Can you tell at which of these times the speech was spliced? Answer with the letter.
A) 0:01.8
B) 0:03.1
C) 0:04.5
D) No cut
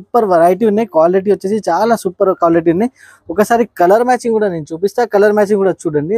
D